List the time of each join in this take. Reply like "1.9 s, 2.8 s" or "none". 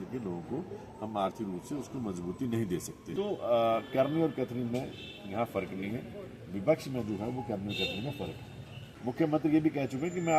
3.0 s, 8.9 s